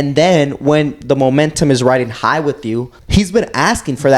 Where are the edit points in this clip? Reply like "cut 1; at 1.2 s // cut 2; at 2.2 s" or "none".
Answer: cut 1; at 2.9 s

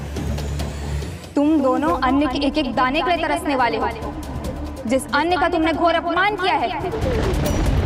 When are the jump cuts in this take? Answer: none

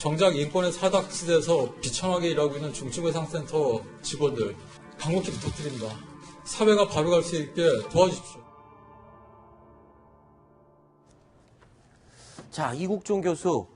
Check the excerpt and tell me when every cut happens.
cut 1; at 3.4 s

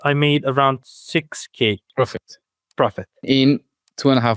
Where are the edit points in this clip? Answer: cut 1; at 1.8 s // cut 2; at 3.3 s

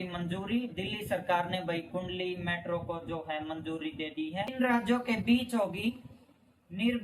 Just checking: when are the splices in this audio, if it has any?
cut 1; at 4.5 s

